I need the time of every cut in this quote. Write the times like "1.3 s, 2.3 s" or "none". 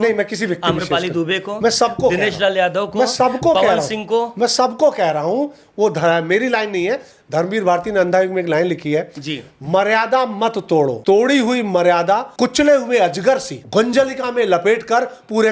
11.0 s, 12.3 s, 13.5 s